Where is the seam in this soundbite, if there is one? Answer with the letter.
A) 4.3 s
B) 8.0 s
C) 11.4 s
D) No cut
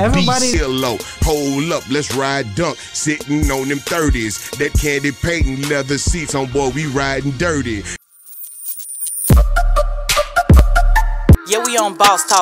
B